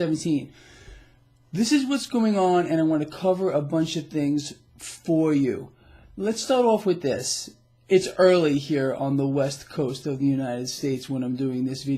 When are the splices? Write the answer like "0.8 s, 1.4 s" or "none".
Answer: 9.9 s